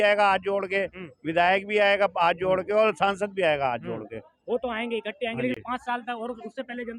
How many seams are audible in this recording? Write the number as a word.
zero